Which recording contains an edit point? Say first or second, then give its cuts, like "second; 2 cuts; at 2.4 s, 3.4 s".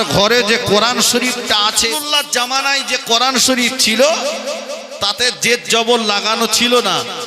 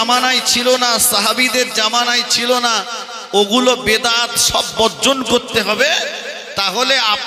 first; 1 cut; at 1.9 s